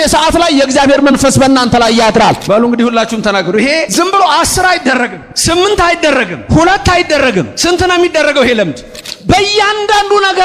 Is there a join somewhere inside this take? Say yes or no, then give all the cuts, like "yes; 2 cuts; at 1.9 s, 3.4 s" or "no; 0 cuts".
yes; 6 cuts; at 2.4 s, 3.9 s, 5.3 s, 6.4 s, 7.5 s, 9.1 s